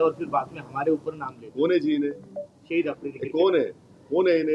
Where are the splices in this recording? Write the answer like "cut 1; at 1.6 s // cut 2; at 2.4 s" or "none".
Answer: none